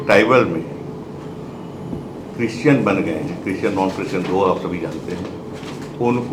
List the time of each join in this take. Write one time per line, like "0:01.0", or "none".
none